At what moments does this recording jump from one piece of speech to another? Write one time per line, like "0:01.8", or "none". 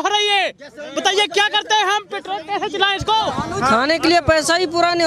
0:03.4